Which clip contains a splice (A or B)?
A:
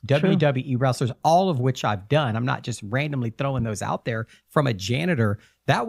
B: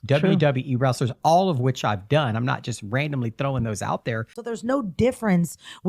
B